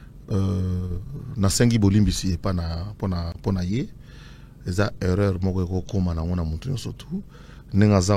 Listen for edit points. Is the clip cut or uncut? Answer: uncut